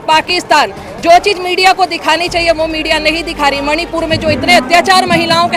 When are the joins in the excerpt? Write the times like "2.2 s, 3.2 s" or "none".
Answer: none